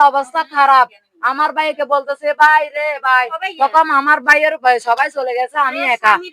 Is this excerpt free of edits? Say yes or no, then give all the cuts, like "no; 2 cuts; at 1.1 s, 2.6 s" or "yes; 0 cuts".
yes; 0 cuts